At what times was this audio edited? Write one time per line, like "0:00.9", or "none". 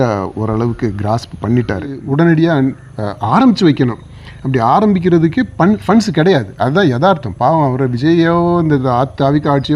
0:02.0

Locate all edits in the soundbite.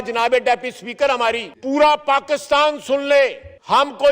0:01.5

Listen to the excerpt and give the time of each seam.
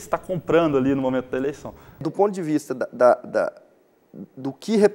0:02.1

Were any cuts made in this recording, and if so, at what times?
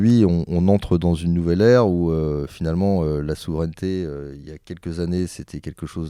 none

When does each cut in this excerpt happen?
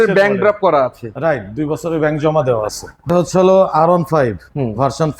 0:03.1

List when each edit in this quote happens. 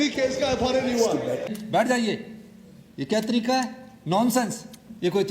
0:01.6

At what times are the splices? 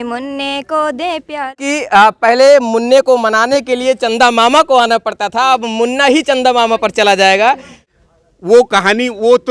0:01.6
0:07.9

